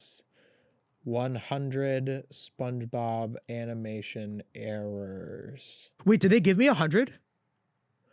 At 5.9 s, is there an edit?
yes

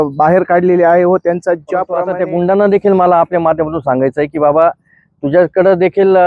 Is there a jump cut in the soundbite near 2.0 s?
yes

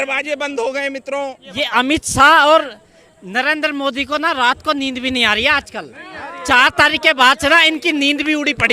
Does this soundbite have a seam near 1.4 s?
yes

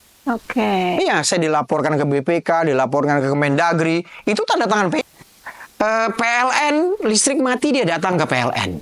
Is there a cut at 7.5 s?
no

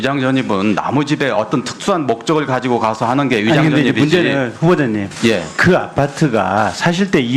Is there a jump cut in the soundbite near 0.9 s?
no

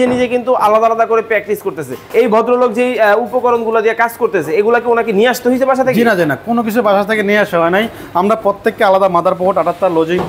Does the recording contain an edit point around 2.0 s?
yes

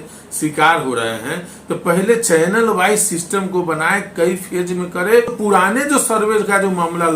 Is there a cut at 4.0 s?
no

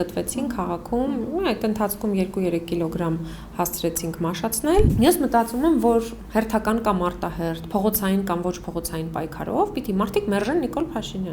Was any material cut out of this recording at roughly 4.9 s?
yes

